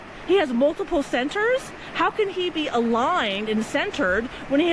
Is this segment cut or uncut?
uncut